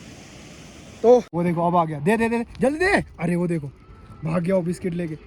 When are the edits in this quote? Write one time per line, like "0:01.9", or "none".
0:01.3